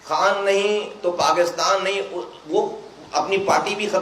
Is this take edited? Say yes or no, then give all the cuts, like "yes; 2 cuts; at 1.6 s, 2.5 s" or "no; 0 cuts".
no; 0 cuts